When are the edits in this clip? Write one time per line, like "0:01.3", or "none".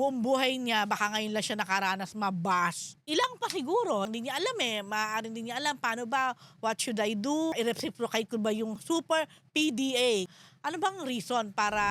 0:02.9
0:04.1
0:07.5
0:08.8
0:10.3